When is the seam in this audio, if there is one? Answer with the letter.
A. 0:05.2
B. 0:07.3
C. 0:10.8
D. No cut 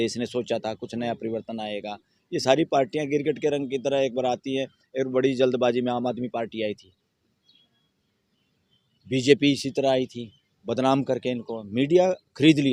D